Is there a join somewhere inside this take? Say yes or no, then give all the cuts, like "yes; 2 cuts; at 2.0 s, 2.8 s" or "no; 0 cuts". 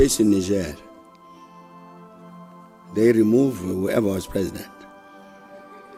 no; 0 cuts